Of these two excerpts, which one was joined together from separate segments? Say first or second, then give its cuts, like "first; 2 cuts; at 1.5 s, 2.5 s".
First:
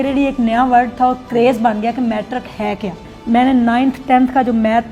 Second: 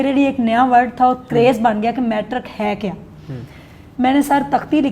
first; 1 cut; at 3.1 s